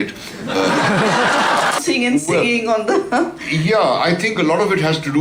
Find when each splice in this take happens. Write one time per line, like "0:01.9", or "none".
0:01.8